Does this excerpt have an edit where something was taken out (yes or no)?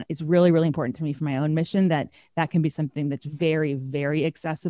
no